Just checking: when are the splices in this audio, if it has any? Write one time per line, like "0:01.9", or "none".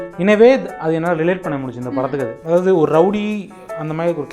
0:02.4